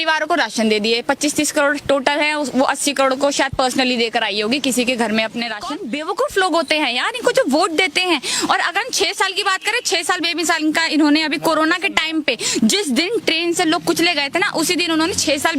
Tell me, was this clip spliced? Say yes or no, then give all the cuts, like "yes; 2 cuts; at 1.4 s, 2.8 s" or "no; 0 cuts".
yes; 1 cut; at 5.6 s